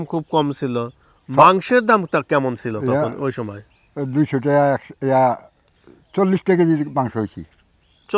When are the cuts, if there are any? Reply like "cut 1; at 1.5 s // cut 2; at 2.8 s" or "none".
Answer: none